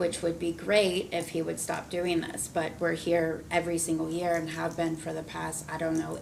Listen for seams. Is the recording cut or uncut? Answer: uncut